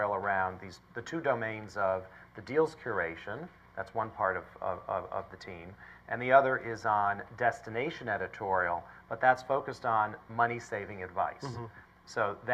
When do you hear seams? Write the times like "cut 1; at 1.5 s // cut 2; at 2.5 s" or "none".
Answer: none